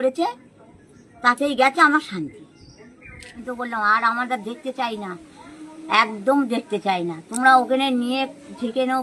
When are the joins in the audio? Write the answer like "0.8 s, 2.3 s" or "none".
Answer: 3.4 s